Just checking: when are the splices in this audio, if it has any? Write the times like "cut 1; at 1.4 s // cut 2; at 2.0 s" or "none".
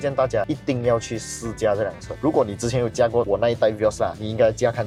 none